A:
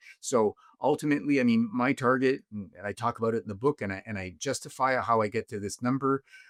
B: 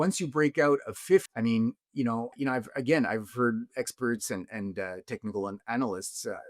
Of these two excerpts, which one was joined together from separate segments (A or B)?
B